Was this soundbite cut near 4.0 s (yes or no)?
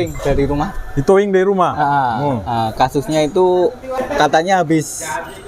yes